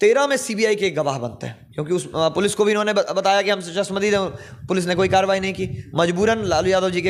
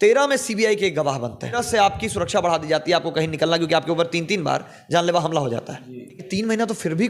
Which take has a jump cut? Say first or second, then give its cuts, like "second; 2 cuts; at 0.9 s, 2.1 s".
second; 2 cuts; at 1.6 s, 6.3 s